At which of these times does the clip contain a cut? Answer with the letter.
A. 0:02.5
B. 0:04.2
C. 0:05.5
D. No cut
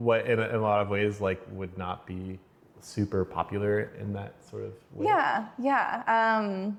D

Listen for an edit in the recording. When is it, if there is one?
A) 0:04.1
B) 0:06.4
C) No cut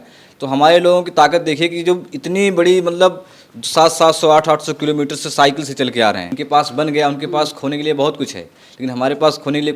B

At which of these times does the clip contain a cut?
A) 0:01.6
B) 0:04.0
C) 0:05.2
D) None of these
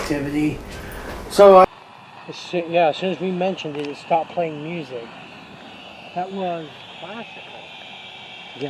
A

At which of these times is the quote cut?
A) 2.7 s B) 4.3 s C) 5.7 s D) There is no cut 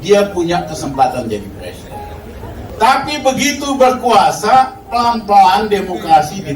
A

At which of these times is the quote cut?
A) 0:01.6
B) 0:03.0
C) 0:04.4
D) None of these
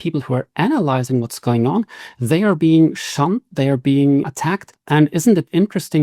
C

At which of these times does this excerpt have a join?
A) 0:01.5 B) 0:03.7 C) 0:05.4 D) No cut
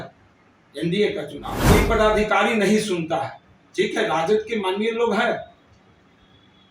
A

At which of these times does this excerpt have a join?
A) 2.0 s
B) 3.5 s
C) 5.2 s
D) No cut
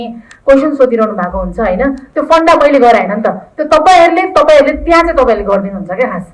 A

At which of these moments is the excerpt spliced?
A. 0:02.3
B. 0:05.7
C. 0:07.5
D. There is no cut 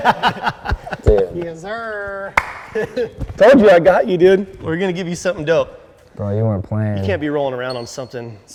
D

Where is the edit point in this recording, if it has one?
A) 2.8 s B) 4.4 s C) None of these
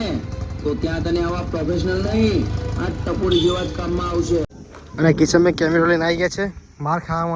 B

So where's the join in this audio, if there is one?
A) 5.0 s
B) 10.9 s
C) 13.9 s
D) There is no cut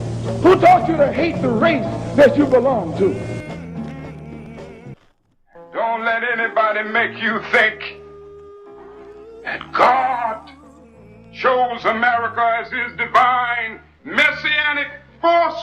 A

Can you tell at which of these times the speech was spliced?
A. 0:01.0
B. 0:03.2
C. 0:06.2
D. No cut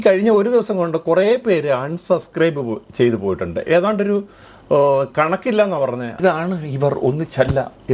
C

